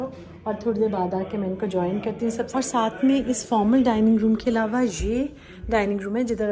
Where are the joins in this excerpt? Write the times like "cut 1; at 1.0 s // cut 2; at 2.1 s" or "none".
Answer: cut 1; at 2.5 s